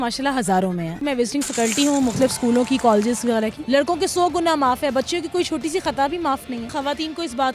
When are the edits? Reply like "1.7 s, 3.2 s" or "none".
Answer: 1.0 s, 3.6 s, 6.7 s